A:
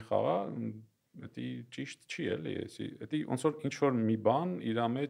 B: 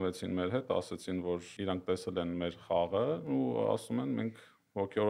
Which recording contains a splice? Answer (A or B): B